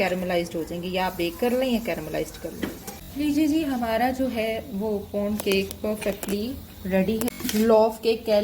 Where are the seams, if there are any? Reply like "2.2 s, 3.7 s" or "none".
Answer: 2.8 s, 7.3 s